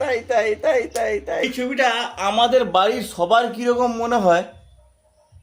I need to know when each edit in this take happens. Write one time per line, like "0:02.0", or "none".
0:01.4